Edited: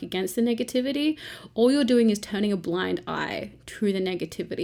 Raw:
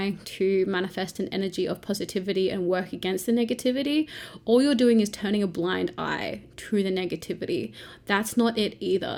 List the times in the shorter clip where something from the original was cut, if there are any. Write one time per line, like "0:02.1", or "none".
none